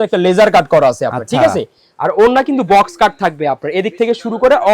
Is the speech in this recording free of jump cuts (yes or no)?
yes